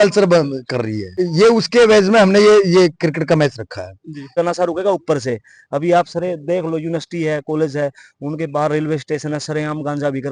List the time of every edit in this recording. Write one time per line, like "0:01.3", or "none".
0:01.2
0:04.4